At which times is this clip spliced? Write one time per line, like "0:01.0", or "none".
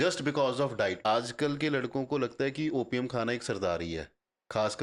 0:01.1